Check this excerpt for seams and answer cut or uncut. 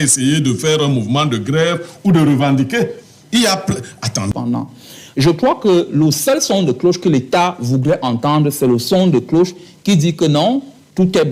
cut